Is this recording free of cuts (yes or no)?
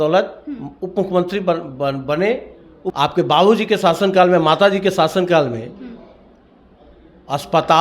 no